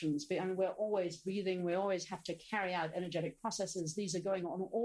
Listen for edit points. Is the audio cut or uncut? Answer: uncut